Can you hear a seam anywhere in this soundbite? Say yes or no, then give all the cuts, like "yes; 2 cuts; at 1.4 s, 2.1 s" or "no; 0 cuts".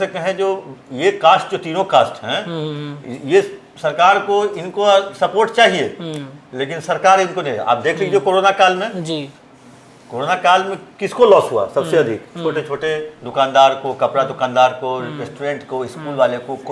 no; 0 cuts